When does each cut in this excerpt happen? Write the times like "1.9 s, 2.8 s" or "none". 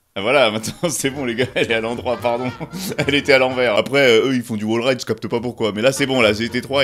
none